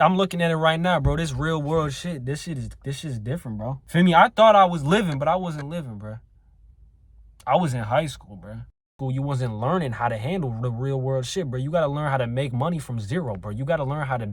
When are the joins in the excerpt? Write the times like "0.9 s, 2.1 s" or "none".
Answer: 3.8 s, 9.0 s